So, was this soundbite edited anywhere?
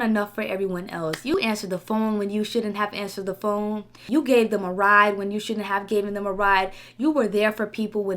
yes; 2 cuts; at 1.3 s, 3.9 s

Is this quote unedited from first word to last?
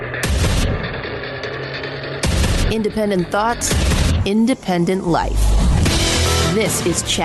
yes; 0 cuts

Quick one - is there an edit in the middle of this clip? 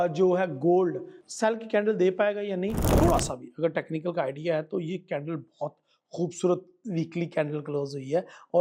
yes; 1 cut; at 2.8 s

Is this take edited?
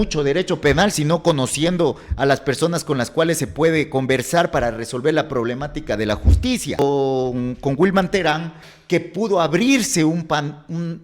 yes; 1 cut; at 6.8 s

